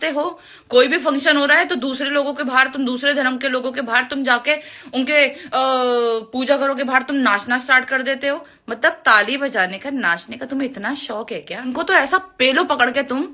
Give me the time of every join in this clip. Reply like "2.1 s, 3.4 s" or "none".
11.7 s